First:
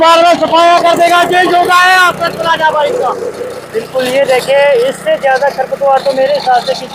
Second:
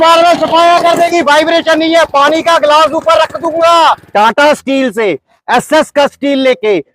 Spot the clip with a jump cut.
second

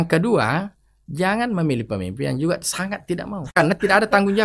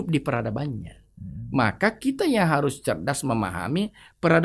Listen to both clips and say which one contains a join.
first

